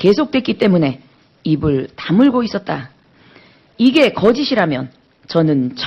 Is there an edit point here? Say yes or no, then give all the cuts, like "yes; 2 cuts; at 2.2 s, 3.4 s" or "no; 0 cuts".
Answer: yes; 1 cut; at 2.5 s